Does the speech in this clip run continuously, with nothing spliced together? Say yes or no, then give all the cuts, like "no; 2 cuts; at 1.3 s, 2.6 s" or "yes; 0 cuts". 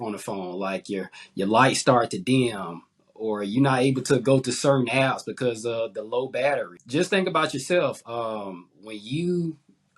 no; 1 cut; at 6.8 s